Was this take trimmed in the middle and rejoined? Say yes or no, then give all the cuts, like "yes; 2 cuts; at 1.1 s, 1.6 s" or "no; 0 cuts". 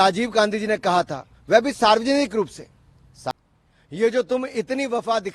yes; 1 cut; at 3.3 s